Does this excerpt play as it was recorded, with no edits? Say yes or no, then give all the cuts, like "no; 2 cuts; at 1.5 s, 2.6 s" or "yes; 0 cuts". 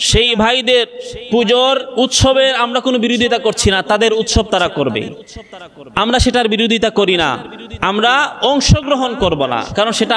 yes; 0 cuts